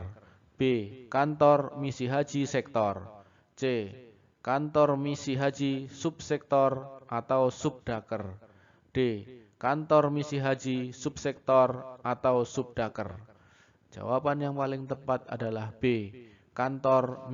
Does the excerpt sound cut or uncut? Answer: cut